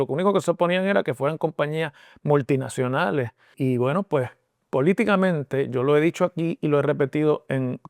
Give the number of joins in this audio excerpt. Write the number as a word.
one